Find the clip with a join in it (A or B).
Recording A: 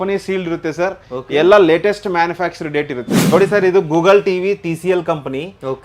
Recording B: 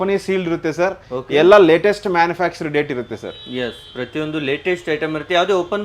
A